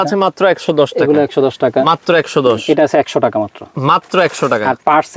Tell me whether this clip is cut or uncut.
uncut